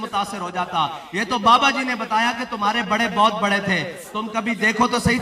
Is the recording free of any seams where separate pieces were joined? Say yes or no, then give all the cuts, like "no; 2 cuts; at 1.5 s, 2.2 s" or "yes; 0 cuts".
no; 1 cut; at 0.9 s